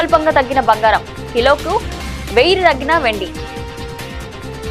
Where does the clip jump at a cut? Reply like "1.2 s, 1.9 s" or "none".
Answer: none